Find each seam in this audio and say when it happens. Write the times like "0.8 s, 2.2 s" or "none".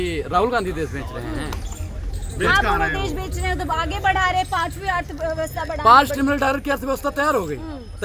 none